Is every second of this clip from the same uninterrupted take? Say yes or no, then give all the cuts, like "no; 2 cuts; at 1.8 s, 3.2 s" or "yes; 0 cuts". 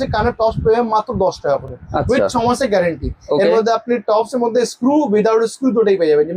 yes; 0 cuts